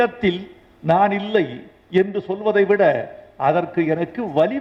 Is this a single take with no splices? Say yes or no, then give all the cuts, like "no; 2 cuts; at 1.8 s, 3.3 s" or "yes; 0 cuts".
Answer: yes; 0 cuts